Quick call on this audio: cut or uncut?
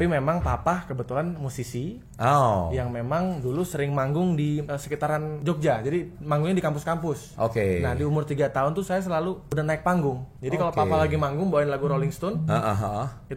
cut